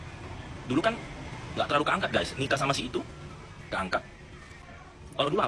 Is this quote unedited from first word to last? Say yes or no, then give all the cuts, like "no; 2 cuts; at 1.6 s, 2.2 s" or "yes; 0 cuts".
yes; 0 cuts